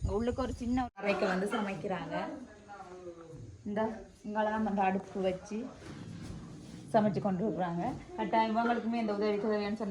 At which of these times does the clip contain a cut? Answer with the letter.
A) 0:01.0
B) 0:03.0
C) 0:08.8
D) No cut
A